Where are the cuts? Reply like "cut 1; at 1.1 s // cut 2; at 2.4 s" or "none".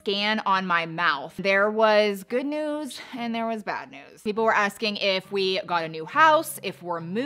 cut 1; at 1.4 s // cut 2; at 4.1 s